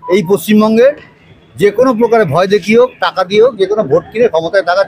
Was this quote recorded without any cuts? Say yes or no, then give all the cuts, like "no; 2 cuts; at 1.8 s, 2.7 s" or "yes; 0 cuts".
yes; 0 cuts